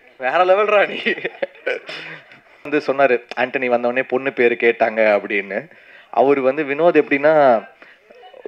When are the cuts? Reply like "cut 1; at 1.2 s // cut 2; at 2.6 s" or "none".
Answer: cut 1; at 2.7 s